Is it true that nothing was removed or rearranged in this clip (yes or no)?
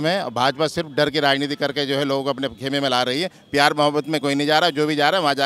yes